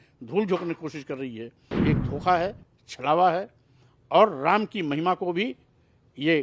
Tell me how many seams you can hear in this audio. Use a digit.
1